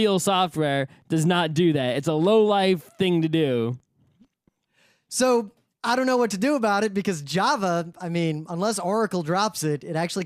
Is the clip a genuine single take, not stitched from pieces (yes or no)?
yes